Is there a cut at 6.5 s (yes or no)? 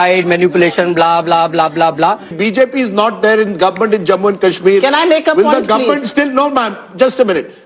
no